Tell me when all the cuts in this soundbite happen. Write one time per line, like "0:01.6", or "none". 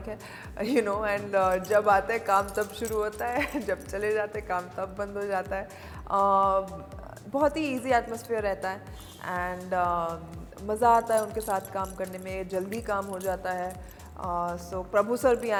none